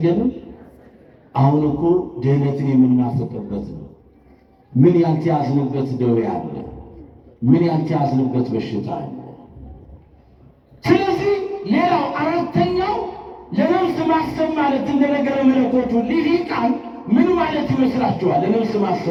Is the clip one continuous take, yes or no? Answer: yes